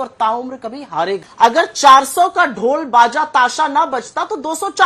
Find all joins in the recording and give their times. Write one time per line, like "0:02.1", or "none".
0:01.2